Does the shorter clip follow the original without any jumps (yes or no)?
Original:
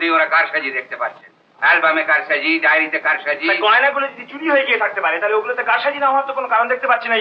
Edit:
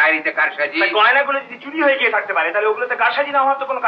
yes